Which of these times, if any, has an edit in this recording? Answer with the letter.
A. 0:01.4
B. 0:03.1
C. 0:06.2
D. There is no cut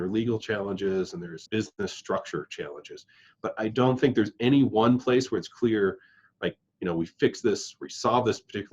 A